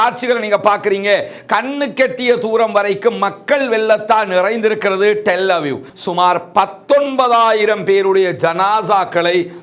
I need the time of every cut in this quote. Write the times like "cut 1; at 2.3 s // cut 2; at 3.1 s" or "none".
cut 1; at 5.9 s